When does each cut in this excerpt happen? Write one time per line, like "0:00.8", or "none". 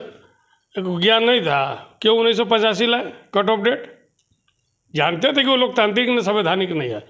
none